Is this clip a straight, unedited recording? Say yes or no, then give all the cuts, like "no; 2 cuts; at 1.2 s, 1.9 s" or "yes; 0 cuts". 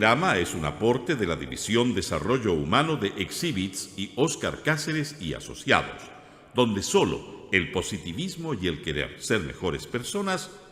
yes; 0 cuts